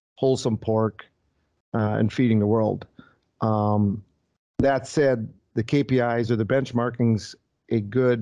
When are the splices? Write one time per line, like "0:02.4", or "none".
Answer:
none